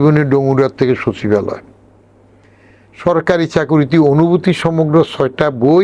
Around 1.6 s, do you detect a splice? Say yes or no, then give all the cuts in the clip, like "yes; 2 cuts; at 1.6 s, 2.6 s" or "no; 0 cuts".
no; 0 cuts